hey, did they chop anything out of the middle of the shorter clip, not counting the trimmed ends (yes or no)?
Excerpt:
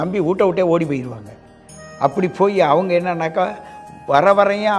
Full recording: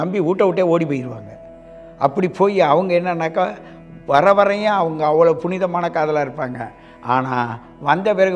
no